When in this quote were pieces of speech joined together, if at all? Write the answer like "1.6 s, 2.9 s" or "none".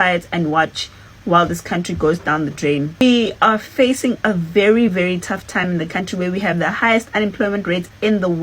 3.0 s